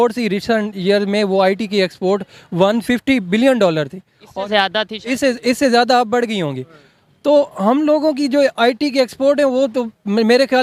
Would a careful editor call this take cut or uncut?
uncut